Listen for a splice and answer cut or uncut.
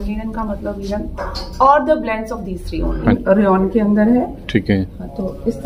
cut